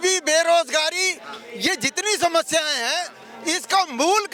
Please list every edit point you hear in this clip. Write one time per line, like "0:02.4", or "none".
none